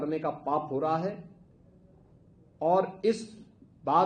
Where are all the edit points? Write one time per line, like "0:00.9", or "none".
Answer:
none